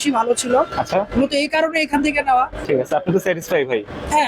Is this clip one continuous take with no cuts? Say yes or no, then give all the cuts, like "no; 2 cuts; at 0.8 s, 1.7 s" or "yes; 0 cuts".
no; 1 cut; at 2.7 s